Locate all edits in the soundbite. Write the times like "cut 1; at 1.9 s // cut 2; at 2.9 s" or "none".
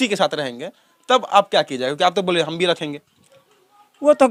none